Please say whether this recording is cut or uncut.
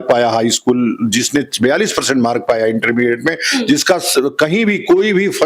uncut